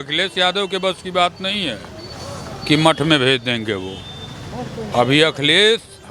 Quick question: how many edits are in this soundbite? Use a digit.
0